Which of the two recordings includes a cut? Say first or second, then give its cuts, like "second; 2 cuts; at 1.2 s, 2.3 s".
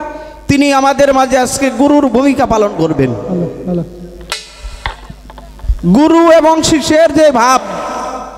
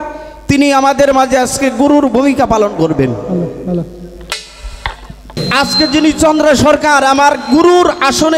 second; 1 cut; at 5.5 s